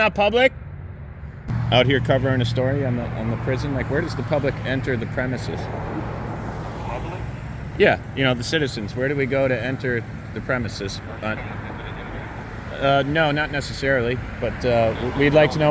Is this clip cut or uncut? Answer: cut